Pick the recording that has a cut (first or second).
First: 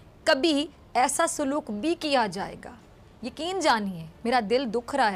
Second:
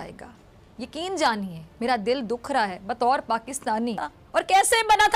second